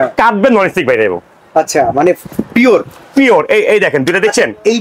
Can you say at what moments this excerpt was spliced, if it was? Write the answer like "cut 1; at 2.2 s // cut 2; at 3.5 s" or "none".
none